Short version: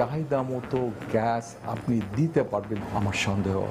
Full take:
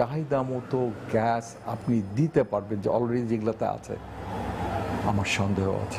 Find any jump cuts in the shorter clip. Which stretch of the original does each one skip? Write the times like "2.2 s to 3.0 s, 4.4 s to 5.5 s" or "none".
2.8 s to 4.9 s